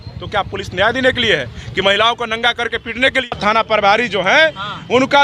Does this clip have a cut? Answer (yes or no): yes